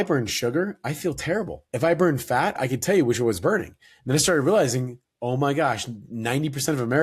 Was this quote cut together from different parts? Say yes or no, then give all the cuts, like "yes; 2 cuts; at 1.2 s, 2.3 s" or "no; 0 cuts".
yes; 2 cuts; at 1.6 s, 2.5 s